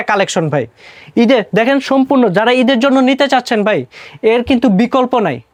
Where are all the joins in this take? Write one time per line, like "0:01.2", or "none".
none

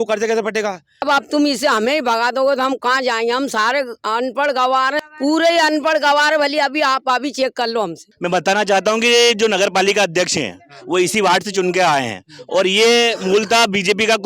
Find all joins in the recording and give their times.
0:00.9
0:05.0
0:08.0

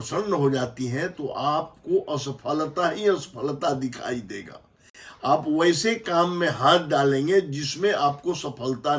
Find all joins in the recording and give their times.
none

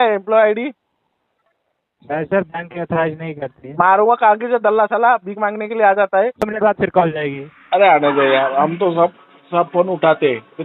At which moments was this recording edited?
0:06.4

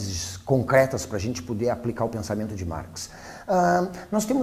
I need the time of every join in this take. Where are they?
none

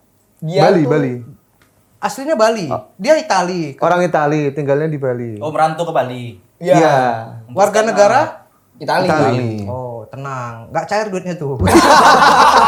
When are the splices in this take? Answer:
none

